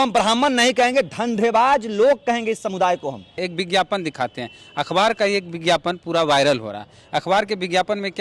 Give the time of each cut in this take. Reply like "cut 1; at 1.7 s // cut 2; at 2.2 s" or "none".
cut 1; at 3.3 s